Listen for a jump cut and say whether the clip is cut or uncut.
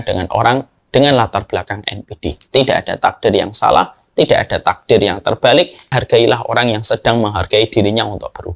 cut